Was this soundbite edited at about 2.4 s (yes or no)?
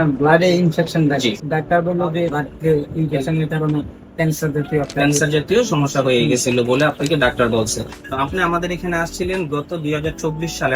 yes